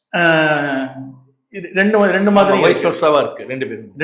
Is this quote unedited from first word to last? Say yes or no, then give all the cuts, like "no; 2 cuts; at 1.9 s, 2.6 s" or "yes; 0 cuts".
yes; 0 cuts